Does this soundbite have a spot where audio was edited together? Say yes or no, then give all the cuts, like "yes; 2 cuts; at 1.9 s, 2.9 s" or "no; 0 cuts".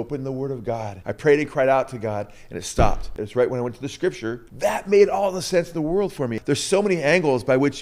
yes; 4 cuts; at 1.0 s, 3.1 s, 4.5 s, 6.4 s